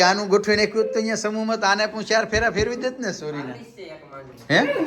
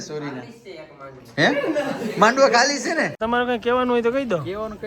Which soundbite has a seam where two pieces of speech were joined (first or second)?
second